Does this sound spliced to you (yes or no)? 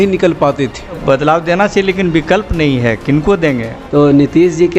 yes